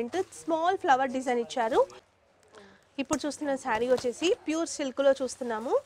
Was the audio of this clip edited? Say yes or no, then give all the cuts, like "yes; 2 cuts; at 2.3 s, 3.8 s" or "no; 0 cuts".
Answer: yes; 1 cut; at 1.9 s